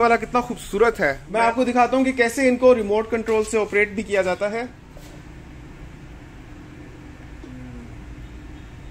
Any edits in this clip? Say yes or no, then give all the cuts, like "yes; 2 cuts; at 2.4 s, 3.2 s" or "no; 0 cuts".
no; 0 cuts